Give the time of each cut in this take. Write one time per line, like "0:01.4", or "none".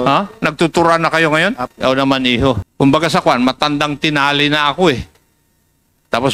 0:01.6
0:02.7